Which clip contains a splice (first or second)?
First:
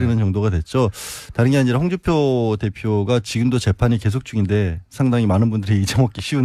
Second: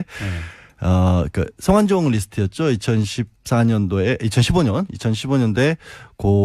second